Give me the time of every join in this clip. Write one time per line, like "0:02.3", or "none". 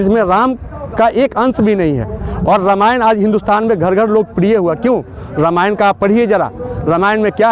none